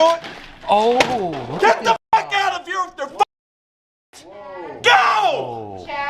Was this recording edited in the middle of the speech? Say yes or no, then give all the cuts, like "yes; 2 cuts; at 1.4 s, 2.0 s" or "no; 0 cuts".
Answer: yes; 1 cut; at 2.1 s